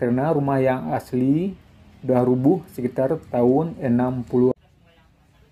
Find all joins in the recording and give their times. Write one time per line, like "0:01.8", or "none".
0:04.5